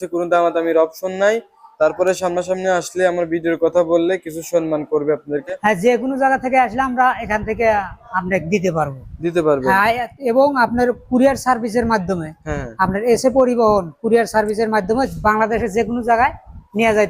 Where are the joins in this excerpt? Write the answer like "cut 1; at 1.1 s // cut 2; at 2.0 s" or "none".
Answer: cut 1; at 5.4 s